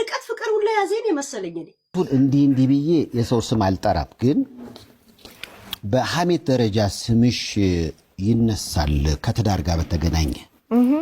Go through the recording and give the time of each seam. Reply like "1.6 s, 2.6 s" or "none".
1.9 s